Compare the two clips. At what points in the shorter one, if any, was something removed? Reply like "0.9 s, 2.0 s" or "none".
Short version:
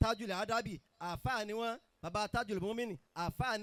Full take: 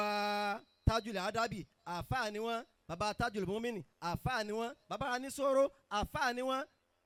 none